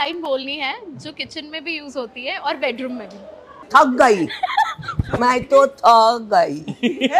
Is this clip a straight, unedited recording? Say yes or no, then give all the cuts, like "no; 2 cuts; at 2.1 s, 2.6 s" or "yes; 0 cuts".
no; 1 cut; at 3.5 s